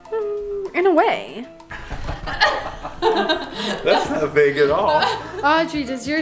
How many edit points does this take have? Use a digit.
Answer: 1